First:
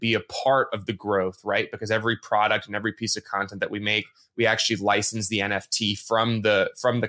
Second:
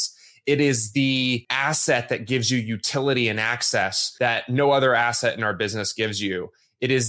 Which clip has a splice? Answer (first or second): second